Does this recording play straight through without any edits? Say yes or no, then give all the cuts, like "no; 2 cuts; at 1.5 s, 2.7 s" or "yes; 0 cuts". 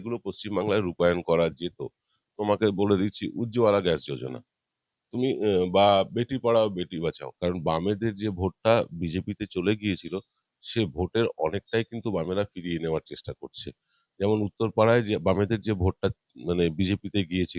no; 1 cut; at 6.9 s